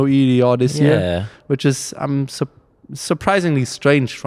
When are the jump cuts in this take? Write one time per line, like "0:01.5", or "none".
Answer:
none